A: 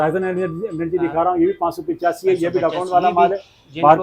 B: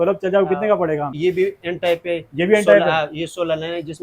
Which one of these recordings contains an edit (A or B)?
B